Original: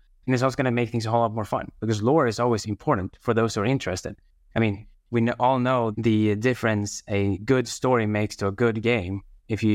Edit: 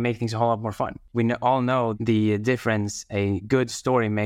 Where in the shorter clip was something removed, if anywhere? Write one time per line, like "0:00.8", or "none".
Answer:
0:01.0